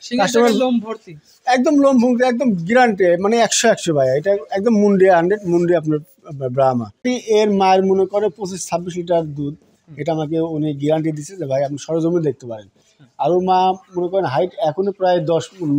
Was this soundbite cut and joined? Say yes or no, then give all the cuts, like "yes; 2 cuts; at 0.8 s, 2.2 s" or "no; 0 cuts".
yes; 1 cut; at 7.0 s